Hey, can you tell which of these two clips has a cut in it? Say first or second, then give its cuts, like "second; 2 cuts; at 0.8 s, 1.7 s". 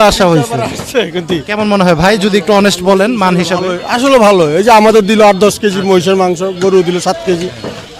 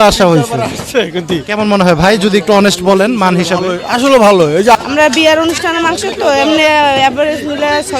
second; 1 cut; at 4.8 s